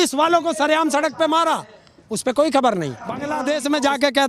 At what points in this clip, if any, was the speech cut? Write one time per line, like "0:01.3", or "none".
0:03.2